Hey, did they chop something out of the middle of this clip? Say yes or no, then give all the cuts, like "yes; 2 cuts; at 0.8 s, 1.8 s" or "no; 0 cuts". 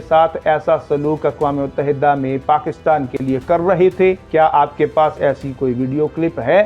no; 0 cuts